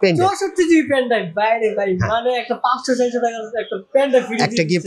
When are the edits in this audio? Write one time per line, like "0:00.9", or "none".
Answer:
none